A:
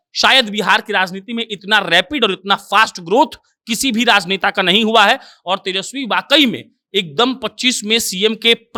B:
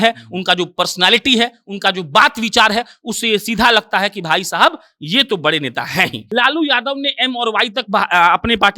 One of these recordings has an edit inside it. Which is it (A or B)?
B